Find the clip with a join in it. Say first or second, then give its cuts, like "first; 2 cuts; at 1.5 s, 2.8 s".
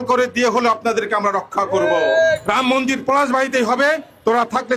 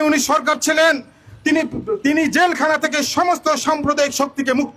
first; 1 cut; at 2.4 s